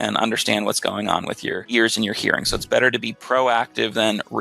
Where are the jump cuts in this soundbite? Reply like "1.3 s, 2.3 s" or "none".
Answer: 1.6 s